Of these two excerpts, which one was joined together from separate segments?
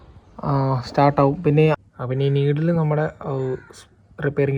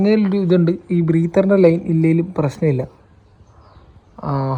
first; 1 cut; at 1.8 s

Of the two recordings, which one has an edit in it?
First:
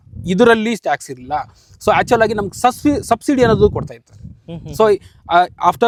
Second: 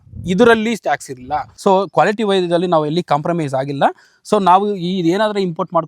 second; 1 cut; at 1.4 s

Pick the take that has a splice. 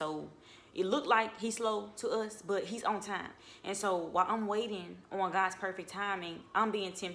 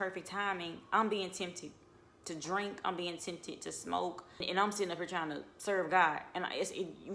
second; 1 cut; at 4.4 s

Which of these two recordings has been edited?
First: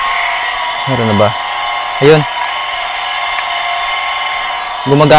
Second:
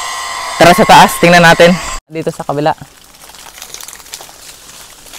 second; 1 cut; at 2.1 s

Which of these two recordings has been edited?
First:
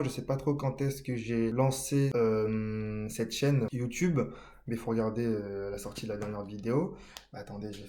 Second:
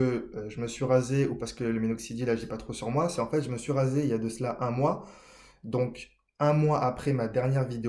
first; 2 cuts; at 1.8 s, 3.7 s

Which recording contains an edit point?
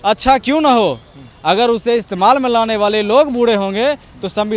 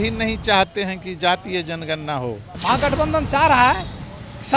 second; 1 cut; at 2.5 s

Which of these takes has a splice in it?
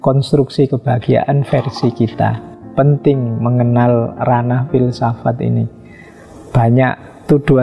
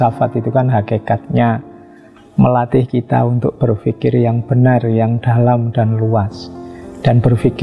first; 1 cut; at 2.6 s

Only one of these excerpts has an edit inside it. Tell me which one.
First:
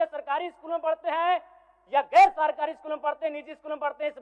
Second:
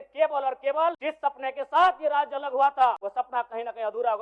second; 2 cuts; at 1.0 s, 3.0 s

